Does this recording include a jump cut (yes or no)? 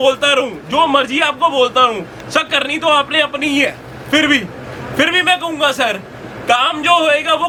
no